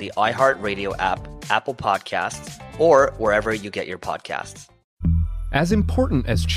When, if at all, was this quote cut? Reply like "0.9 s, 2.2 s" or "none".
4.4 s